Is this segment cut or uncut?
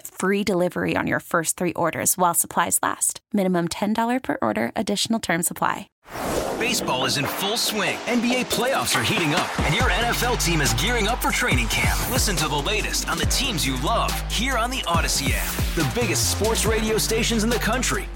cut